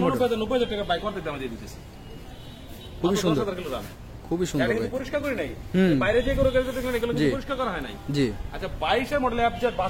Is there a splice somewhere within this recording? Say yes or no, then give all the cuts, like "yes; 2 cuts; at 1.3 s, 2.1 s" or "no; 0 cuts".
no; 0 cuts